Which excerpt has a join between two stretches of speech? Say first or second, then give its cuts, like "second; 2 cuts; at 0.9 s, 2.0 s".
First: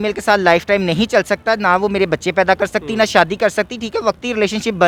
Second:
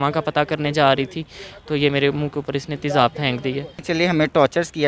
second; 1 cut; at 3.8 s